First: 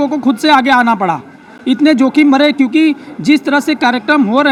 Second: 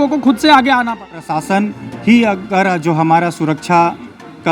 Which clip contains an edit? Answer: second; 1 cut; at 1.2 s

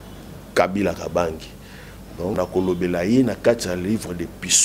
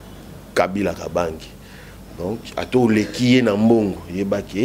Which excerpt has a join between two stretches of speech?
first; 1 cut; at 2.4 s

